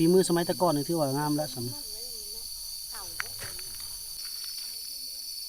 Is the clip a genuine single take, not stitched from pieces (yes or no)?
no